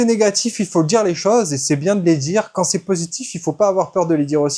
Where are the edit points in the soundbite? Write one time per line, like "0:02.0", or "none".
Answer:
none